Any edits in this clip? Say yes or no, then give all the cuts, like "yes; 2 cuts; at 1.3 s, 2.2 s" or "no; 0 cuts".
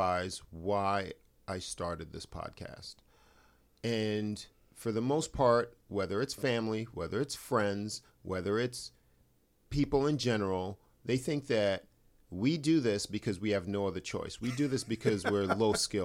no; 0 cuts